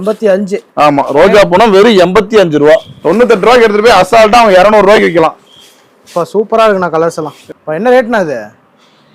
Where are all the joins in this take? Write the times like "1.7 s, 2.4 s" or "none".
2.9 s, 7.3 s